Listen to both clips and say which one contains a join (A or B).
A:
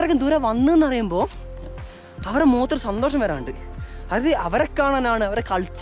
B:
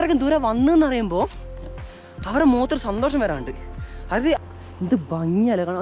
B